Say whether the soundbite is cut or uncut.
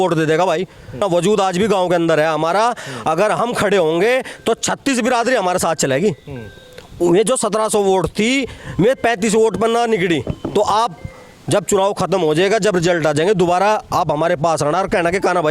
cut